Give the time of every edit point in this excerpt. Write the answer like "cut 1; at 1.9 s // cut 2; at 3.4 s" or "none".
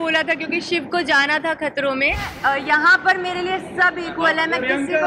cut 1; at 2.3 s